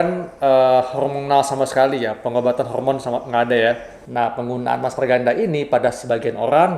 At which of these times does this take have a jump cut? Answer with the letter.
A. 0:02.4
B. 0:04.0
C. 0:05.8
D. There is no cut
B